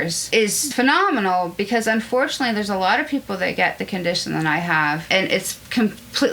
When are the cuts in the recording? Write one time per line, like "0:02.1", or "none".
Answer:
none